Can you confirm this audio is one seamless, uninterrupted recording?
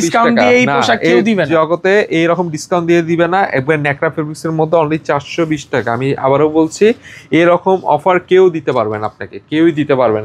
yes; 0 cuts

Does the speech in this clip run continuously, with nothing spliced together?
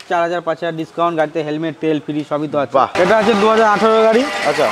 no; 1 cut; at 2.9 s

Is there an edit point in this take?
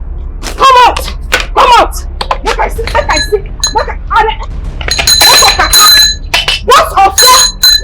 no; 0 cuts

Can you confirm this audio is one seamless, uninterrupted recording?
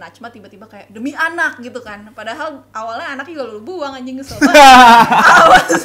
yes; 0 cuts

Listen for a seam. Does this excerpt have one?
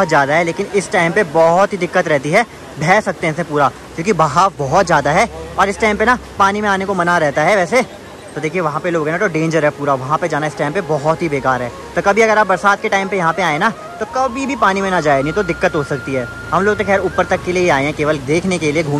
no; 0 cuts

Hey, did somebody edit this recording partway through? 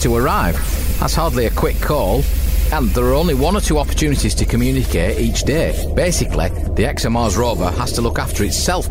no; 0 cuts

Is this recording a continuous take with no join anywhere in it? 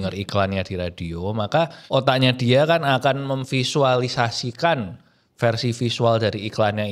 no; 1 cut; at 1.8 s

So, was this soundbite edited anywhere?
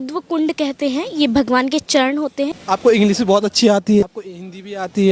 yes; 2 cuts; at 2.6 s, 4.0 s

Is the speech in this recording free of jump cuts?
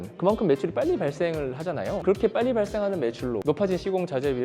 no; 2 cuts; at 2.0 s, 3.4 s

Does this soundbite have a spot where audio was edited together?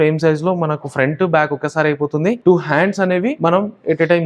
yes; 2 cuts; at 2.4 s, 3.4 s

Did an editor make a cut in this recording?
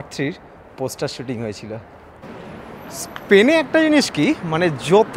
yes; 1 cut; at 2.3 s

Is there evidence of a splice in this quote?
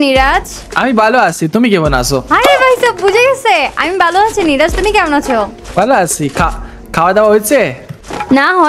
no; 0 cuts

